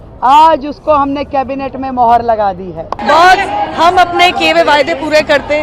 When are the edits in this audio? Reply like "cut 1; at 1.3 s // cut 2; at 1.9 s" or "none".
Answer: cut 1; at 2.9 s